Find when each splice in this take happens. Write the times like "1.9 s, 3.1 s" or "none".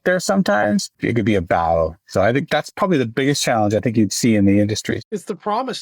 0.9 s, 4.9 s